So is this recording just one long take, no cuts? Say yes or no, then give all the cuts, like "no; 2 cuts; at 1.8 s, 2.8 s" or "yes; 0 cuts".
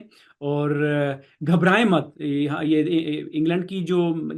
yes; 0 cuts